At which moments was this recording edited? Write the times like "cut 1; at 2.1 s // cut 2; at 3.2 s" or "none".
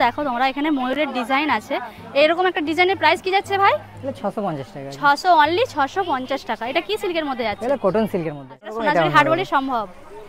cut 1; at 8.7 s